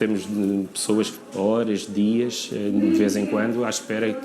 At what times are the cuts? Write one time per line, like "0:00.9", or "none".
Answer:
0:01.2